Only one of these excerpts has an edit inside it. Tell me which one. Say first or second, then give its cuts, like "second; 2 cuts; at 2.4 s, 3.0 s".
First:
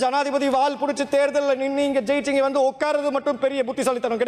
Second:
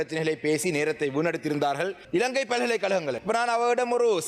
second; 2 cuts; at 2.0 s, 3.2 s